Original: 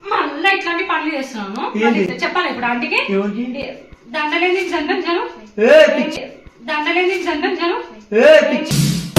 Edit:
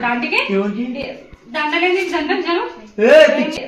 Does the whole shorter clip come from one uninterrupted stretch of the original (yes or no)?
yes